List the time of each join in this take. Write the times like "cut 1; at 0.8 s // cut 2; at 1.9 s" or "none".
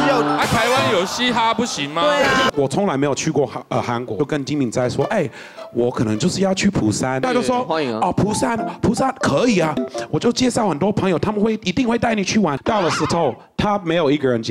cut 1; at 2.5 s // cut 2; at 4.2 s // cut 3; at 7.2 s // cut 4; at 9.9 s // cut 5; at 12.6 s